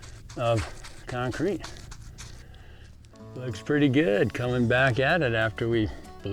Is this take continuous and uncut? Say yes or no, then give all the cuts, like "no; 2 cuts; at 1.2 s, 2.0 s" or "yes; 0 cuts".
no; 1 cut; at 3.2 s